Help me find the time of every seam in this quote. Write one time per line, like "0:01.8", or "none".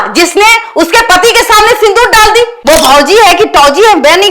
0:02.6

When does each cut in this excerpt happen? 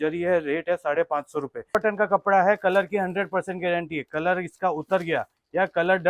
0:01.8

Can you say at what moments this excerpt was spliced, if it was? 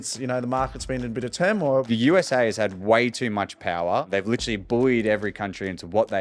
0:01.9
0:04.1

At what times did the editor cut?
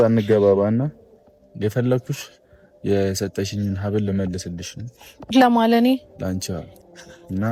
none

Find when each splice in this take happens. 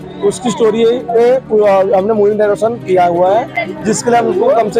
none

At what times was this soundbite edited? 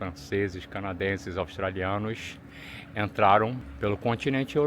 0:03.7

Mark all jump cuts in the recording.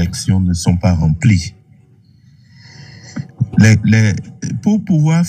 none

